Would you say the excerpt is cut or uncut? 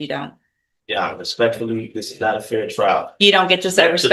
uncut